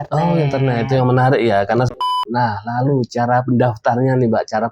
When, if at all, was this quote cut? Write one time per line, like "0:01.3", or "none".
0:01.9